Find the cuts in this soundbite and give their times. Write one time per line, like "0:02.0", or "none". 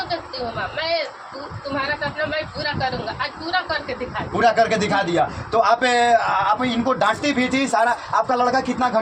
none